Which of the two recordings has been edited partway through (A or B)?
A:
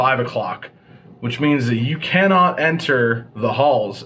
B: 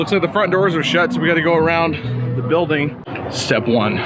B